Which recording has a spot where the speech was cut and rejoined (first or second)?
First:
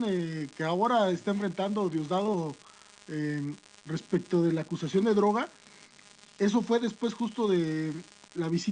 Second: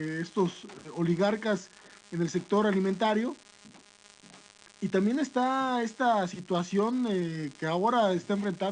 second